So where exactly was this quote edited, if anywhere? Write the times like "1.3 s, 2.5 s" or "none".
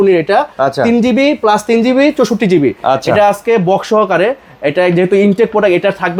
none